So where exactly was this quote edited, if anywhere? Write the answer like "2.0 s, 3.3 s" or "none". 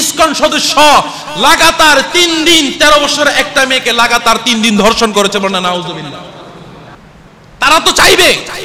6.9 s

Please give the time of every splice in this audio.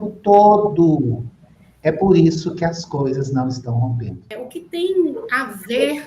4.4 s

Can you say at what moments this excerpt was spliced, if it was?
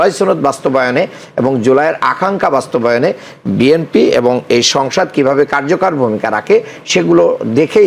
none

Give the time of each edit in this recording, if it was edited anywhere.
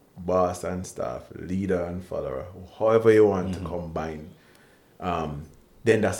none

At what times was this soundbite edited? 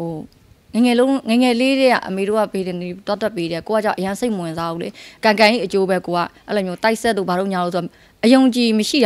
5.1 s

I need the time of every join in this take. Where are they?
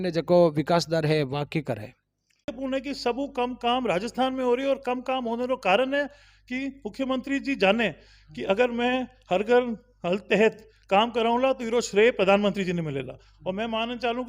2.5 s

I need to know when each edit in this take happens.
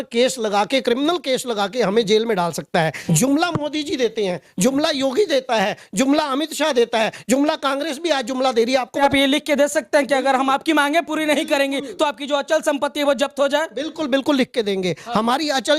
3.0 s, 9.0 s

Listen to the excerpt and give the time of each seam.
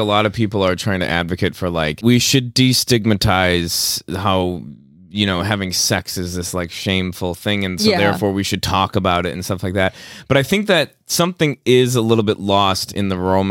1.9 s

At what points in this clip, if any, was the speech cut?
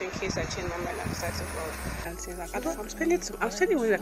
2.1 s

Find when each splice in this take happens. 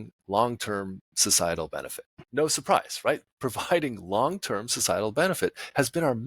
2.3 s

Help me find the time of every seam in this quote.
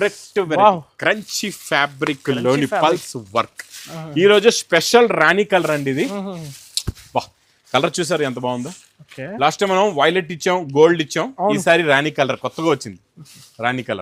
none

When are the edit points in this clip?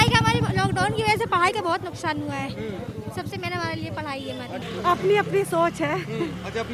4.7 s

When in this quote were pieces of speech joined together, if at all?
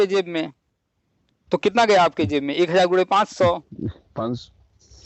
none

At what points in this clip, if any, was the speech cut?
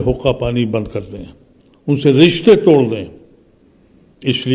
none

